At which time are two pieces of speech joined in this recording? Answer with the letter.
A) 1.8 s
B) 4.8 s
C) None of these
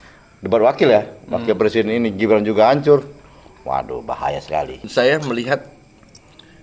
B